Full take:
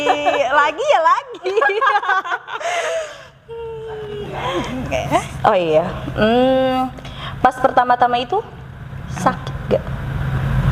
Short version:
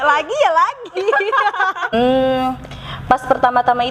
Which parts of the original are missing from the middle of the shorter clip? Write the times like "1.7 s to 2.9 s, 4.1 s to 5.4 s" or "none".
2.4 s to 6.3 s